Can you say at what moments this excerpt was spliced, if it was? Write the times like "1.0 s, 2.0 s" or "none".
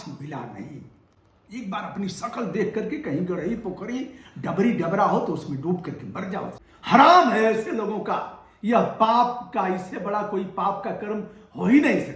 6.7 s